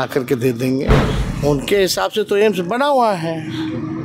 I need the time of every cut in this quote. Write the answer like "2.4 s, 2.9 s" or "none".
0.9 s